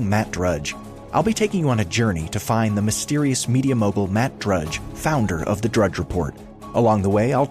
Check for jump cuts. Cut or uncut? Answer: uncut